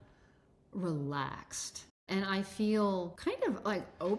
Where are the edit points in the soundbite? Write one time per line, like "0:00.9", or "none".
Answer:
0:02.0
0:03.1